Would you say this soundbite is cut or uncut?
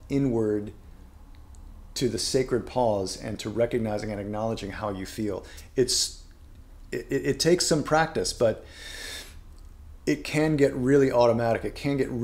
uncut